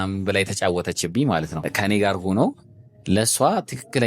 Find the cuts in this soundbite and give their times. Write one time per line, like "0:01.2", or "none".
0:01.6